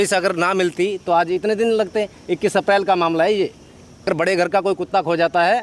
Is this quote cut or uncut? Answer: cut